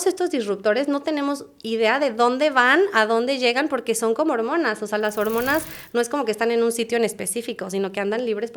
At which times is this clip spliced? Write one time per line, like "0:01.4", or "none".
none